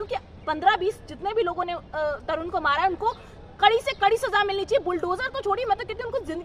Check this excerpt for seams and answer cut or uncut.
uncut